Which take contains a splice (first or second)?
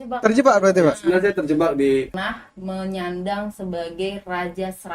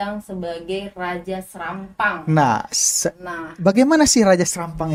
first